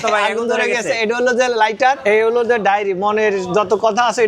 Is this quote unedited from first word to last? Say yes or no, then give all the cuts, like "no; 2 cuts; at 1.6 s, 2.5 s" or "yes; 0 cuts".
no; 1 cut; at 2.0 s